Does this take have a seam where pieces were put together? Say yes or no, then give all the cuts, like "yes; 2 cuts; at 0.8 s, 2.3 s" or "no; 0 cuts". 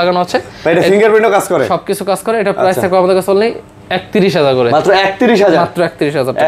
no; 0 cuts